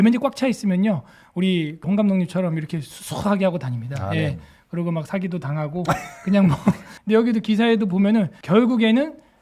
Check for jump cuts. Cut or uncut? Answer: cut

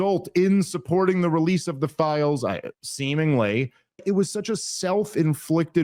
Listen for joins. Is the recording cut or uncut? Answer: cut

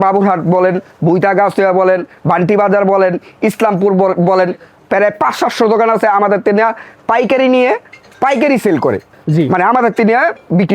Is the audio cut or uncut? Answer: cut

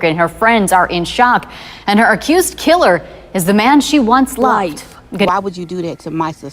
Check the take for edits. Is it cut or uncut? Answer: cut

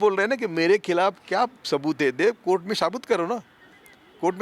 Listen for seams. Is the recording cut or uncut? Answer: uncut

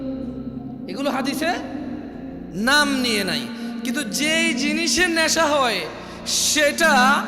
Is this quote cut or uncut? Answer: cut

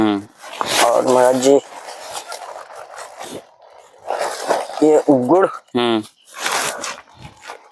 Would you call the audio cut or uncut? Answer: uncut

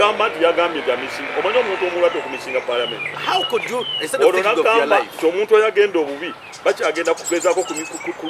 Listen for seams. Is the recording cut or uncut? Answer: uncut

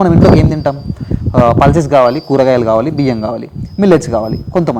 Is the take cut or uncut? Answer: uncut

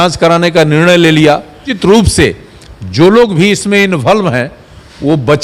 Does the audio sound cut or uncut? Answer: cut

